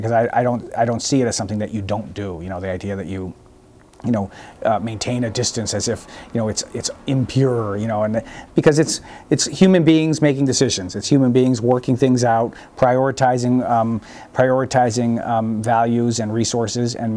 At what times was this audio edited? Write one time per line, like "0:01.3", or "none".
none